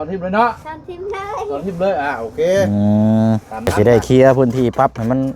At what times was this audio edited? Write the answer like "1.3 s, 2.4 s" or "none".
3.7 s